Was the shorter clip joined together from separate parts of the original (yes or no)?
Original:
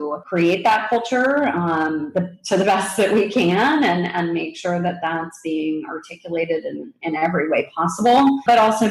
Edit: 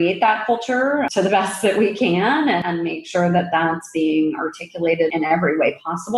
yes